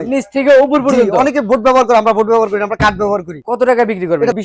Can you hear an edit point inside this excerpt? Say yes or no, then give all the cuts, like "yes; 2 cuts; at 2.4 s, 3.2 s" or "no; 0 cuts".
no; 0 cuts